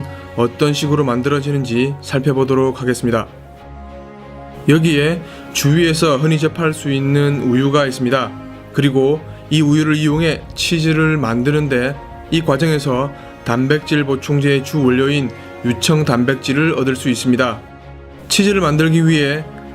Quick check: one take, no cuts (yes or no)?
no